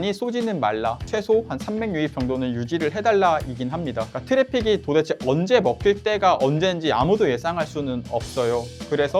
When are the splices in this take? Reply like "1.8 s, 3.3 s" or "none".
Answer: 1.0 s, 4.1 s